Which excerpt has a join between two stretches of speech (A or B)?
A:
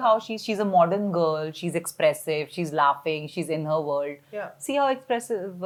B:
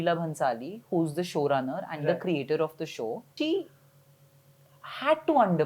B